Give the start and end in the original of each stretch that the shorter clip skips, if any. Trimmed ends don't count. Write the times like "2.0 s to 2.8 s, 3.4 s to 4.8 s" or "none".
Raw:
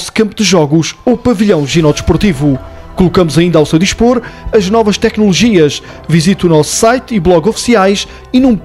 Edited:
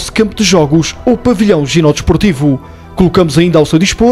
none